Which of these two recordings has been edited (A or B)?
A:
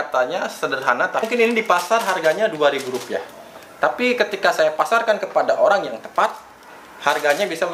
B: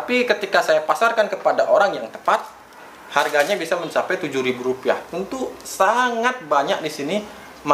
A